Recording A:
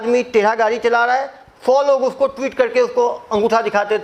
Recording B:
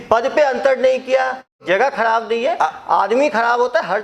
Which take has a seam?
B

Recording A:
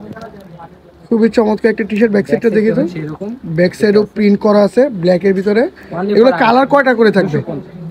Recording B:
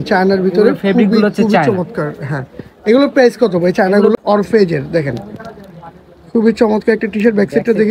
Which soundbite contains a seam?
B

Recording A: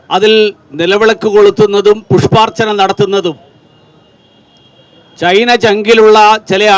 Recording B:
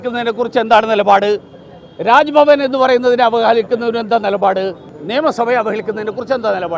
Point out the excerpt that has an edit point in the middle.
B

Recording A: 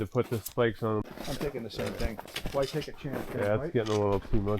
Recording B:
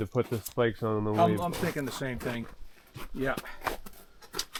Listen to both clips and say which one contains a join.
A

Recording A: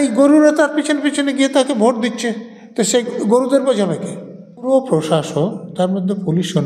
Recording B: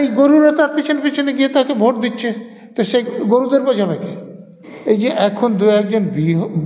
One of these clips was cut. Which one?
B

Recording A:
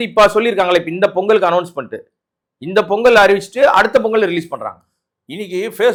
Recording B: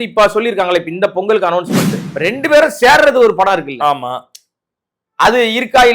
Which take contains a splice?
B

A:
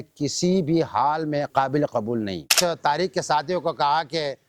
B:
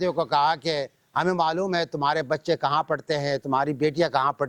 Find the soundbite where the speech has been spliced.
A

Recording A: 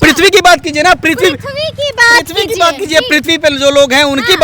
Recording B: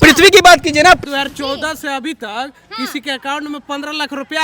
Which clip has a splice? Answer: B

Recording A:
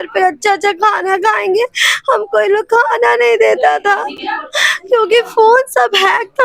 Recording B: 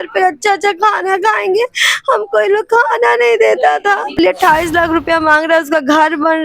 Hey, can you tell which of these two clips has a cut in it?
B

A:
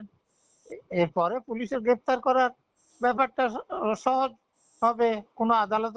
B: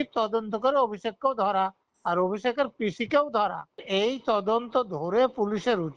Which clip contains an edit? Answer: B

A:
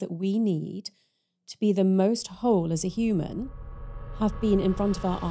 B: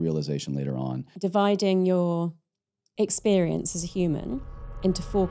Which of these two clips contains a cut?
B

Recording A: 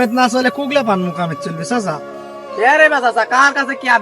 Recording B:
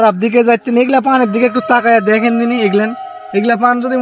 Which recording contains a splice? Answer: A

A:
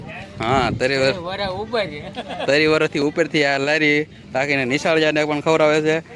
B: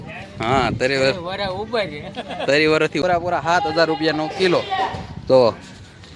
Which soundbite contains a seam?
B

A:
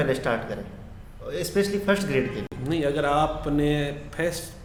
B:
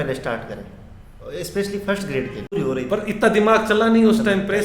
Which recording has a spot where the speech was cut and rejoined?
B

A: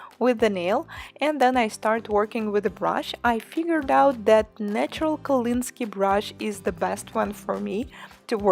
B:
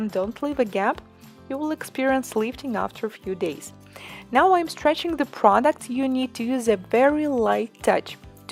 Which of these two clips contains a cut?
A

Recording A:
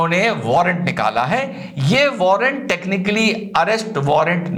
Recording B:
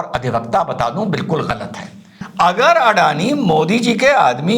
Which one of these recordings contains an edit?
B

